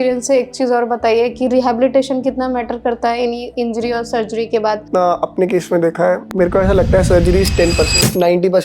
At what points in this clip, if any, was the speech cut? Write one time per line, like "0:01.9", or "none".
0:04.9